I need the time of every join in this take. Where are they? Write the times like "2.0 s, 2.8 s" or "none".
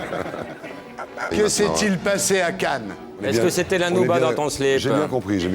3.2 s